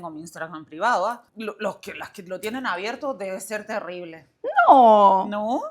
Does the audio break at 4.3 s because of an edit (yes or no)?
no